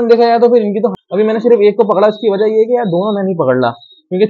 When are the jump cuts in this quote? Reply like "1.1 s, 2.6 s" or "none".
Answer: 1.0 s